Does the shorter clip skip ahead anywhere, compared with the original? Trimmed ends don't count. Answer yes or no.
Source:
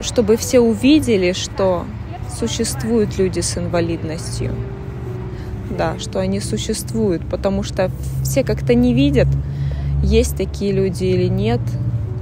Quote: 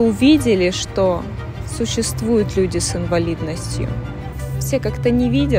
yes